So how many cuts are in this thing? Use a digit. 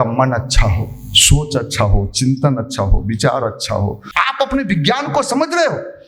1